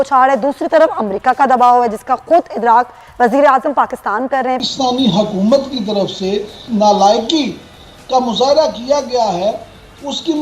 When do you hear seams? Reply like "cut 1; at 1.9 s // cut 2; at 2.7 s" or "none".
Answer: cut 1; at 4.6 s // cut 2; at 6.6 s